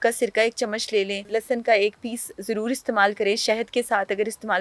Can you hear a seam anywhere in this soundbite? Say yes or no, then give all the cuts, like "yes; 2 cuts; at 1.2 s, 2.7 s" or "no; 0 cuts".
yes; 1 cut; at 1.2 s